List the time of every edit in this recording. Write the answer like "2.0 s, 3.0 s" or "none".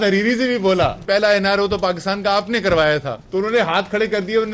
1.0 s, 3.2 s